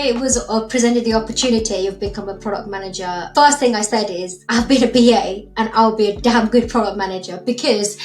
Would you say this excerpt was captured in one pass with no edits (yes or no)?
no